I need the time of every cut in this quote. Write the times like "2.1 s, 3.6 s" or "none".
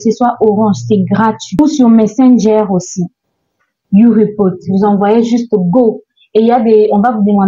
1.6 s